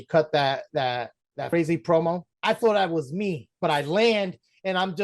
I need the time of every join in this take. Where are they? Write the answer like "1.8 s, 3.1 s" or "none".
1.5 s, 2.3 s, 3.5 s